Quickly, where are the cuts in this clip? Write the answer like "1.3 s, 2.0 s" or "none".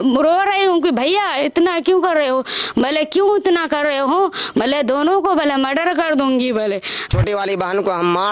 7.1 s